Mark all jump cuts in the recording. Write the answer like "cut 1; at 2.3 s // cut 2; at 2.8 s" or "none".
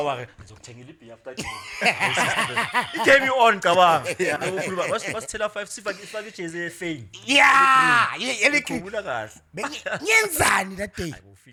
none